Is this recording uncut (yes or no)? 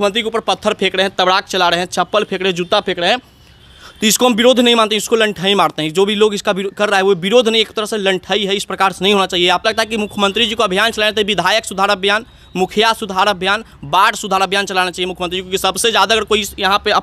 no